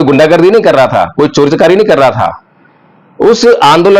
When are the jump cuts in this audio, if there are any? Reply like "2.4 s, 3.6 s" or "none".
none